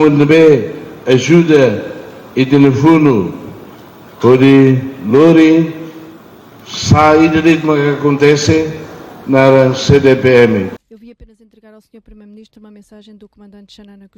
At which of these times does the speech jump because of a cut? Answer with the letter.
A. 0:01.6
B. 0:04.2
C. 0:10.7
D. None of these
C